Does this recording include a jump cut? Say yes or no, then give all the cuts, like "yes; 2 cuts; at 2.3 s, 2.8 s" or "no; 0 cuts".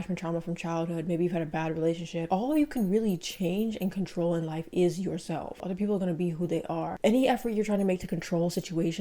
yes; 3 cuts; at 2.3 s, 5.6 s, 7.0 s